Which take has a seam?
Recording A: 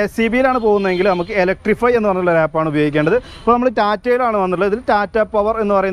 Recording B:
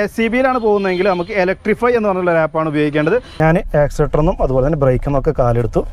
B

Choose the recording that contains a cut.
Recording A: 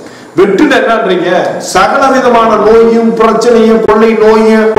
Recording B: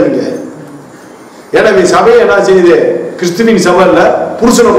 A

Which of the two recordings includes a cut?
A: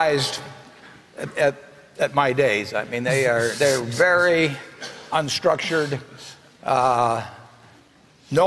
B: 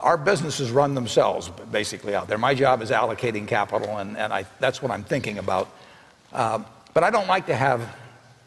B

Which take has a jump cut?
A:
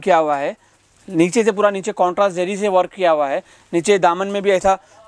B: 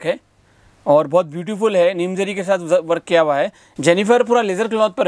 B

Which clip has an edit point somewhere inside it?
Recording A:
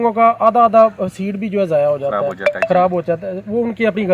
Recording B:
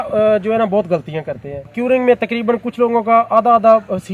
B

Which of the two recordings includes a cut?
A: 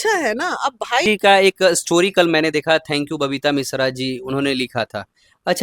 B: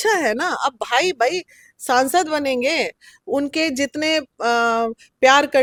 A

